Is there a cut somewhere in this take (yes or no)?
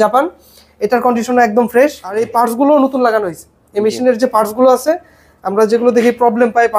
yes